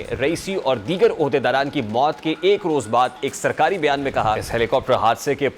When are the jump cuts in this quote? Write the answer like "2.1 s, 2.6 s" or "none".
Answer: 4.5 s